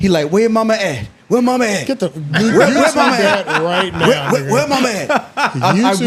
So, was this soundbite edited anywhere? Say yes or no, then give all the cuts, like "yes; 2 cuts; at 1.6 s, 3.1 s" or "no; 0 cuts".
no; 0 cuts